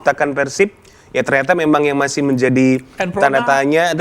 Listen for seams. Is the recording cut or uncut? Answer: uncut